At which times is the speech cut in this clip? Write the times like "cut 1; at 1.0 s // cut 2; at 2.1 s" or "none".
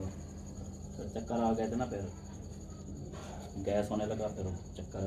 cut 1; at 2.2 s